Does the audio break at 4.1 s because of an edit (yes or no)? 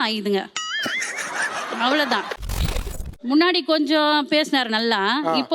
no